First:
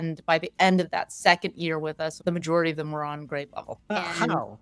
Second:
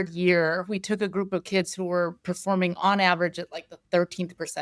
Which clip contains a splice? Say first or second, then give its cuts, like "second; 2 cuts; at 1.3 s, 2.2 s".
first; 2 cuts; at 2.2 s, 3.9 s